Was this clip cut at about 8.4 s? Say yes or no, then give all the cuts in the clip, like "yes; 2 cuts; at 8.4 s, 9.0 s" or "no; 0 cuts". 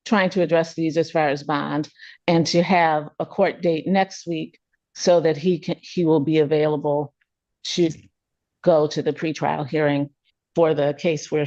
no; 0 cuts